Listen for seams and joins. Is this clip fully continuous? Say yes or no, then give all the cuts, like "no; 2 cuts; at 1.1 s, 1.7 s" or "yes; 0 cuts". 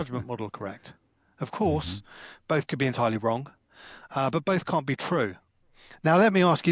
yes; 0 cuts